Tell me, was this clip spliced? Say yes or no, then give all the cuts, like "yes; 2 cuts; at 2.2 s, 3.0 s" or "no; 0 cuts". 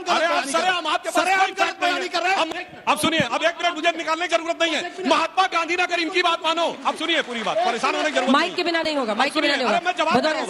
yes; 1 cut; at 2.5 s